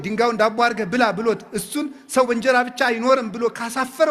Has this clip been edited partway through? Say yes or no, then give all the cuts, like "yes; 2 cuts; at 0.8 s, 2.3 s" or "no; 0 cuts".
no; 0 cuts